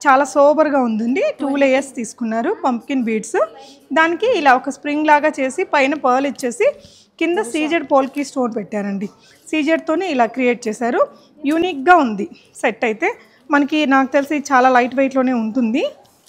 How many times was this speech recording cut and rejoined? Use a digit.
0